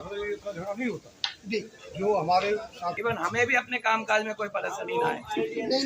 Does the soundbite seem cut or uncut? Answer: cut